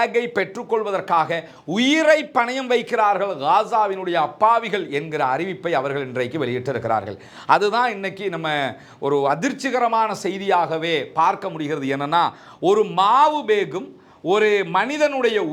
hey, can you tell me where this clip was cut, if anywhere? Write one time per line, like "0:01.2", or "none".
none